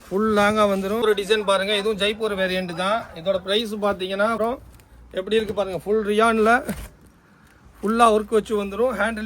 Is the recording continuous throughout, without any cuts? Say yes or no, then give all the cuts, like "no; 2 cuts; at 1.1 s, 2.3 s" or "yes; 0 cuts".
no; 2 cuts; at 1.0 s, 4.4 s